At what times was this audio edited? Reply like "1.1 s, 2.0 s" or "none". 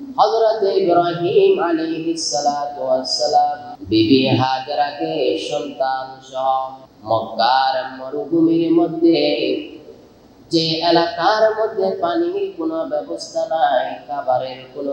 3.7 s, 6.9 s

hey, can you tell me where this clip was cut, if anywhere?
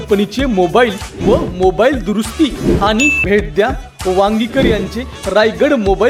3.2 s

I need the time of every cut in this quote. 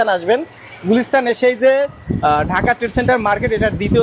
none

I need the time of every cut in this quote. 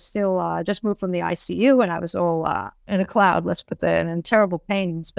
2.9 s

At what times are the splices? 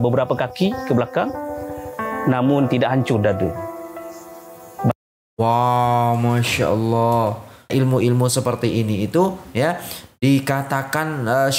7.7 s

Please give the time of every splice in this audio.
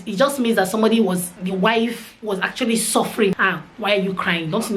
3.3 s

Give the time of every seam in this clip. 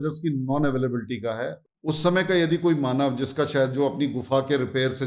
1.6 s

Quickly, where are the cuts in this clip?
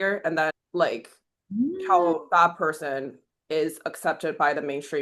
none

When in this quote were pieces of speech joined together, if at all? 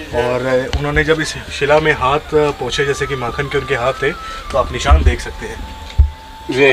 none

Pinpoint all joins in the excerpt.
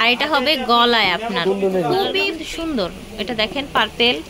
2.3 s

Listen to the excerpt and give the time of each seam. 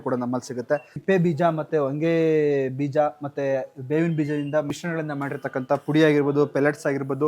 0.9 s, 4.7 s

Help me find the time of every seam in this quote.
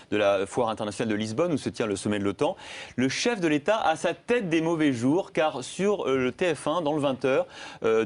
5.7 s

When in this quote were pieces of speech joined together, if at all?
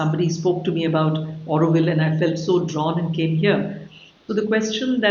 none

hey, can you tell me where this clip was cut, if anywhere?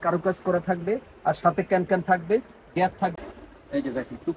3.2 s

